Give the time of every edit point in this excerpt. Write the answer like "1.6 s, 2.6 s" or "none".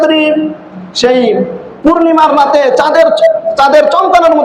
1.6 s, 3.5 s